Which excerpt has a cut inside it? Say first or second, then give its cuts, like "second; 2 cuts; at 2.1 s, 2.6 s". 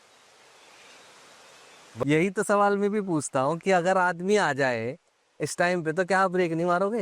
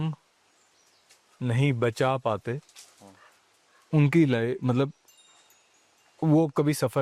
first; 1 cut; at 2.0 s